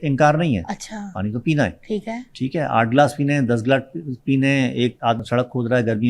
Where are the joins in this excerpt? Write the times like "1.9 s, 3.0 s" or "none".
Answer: 5.2 s